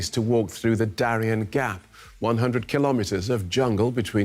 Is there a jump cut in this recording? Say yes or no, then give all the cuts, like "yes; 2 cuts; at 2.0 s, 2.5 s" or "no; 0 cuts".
no; 0 cuts